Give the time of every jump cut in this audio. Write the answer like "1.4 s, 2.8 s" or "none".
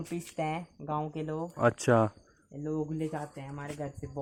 none